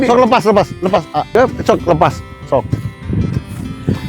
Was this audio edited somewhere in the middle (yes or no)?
yes